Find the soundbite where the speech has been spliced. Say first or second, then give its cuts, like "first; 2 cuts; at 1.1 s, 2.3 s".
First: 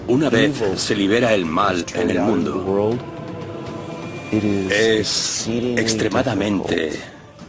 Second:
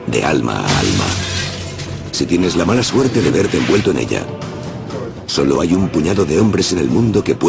second; 1 cut; at 6.2 s